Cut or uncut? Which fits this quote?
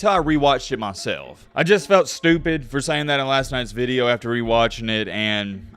cut